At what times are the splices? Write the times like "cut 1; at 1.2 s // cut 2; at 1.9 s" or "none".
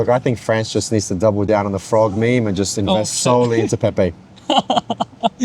cut 1; at 1.5 s